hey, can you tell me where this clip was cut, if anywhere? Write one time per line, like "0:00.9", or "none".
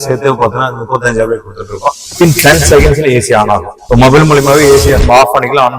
0:02.0
0:03.7